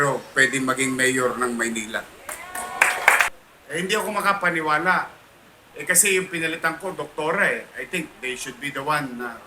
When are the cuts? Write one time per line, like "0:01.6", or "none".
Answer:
0:03.3